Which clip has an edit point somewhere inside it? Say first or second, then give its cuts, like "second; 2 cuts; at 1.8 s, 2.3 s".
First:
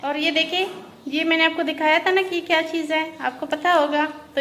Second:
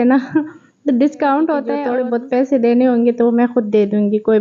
second; 1 cut; at 1.9 s